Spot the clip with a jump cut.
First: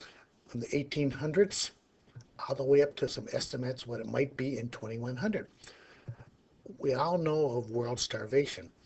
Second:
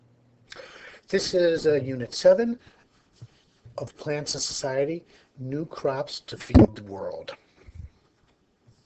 first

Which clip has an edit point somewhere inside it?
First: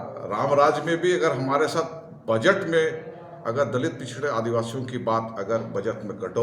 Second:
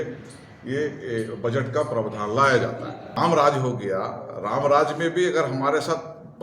second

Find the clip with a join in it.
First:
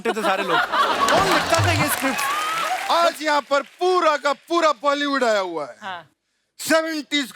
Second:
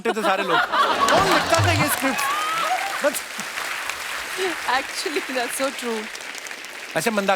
first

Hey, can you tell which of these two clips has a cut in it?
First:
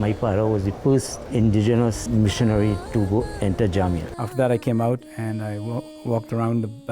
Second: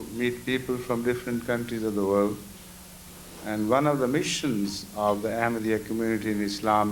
first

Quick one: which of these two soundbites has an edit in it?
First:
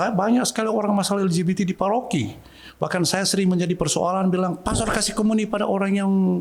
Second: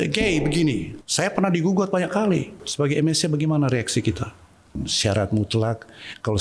second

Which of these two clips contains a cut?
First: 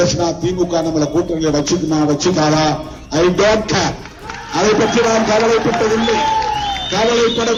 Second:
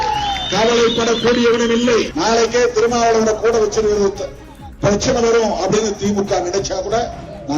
second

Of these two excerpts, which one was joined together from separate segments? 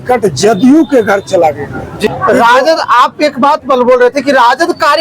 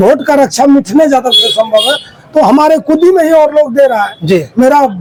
first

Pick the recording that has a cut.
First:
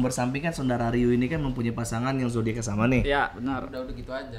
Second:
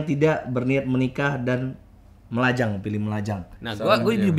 second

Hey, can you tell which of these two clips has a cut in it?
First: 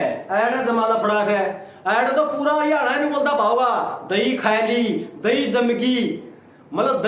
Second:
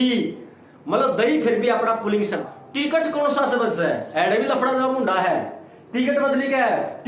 second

